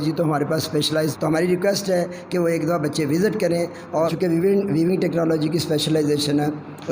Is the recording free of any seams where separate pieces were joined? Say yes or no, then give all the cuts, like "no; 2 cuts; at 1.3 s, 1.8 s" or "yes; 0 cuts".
no; 2 cuts; at 1.2 s, 4.1 s